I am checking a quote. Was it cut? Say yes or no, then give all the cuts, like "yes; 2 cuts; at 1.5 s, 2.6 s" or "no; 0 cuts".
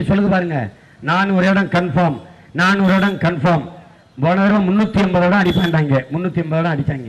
no; 0 cuts